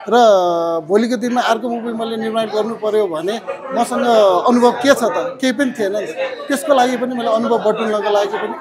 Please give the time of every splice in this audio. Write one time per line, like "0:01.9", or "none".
none

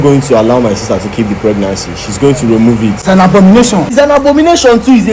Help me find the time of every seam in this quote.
0:03.0
0:03.9

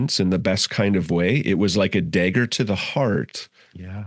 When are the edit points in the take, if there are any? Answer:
none

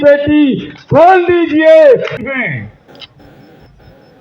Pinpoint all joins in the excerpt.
0:02.1

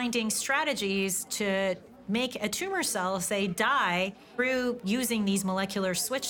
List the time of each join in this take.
none

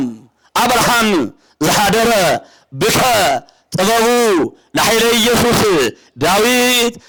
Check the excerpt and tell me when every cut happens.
none

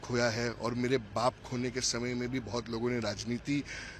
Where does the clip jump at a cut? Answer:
none

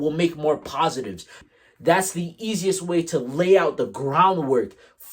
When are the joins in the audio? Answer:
0:01.3

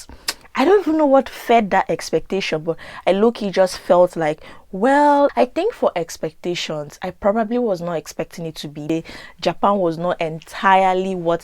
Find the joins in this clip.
0:05.3
0:08.9

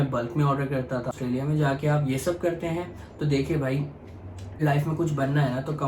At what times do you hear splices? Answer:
0:01.1
0:04.6

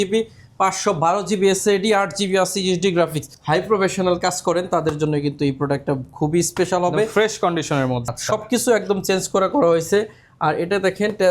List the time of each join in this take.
0:03.3
0:08.1

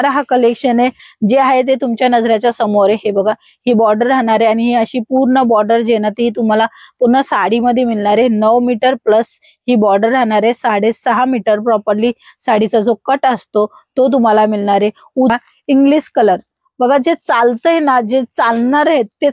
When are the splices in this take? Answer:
0:01.0
0:15.4

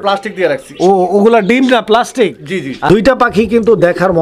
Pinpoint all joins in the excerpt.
0:02.8

